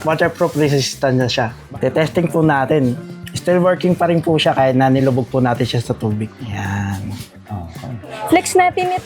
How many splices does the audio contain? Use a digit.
3